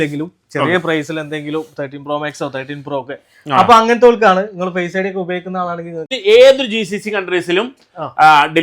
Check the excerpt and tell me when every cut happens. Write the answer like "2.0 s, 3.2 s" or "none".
6.1 s